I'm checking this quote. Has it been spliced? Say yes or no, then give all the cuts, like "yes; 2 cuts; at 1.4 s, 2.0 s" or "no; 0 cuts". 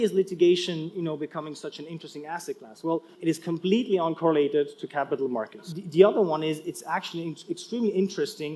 yes; 2 cuts; at 3.1 s, 5.7 s